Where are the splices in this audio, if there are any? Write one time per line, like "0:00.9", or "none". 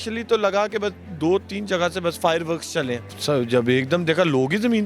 0:03.1